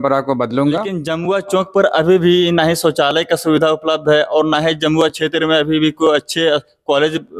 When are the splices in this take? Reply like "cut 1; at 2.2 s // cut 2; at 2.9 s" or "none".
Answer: cut 1; at 1.1 s